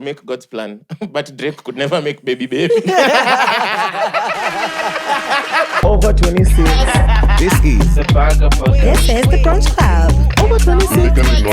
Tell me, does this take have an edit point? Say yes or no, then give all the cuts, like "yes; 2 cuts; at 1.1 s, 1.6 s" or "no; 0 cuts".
yes; 1 cut; at 5.8 s